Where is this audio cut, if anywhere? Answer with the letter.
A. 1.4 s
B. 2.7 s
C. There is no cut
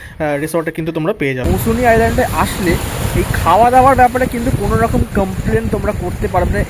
A